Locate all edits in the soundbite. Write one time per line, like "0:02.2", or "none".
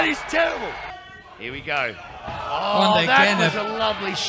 0:01.0